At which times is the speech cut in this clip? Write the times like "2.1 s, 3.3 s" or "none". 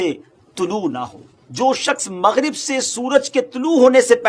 1.4 s